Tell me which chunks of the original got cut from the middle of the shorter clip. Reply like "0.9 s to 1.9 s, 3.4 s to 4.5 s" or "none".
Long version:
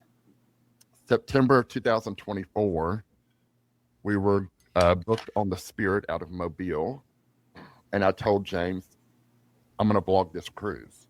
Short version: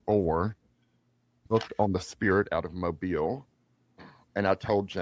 3.9 s to 5.0 s